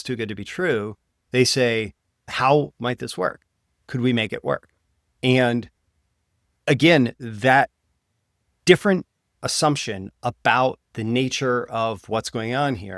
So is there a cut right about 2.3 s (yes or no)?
yes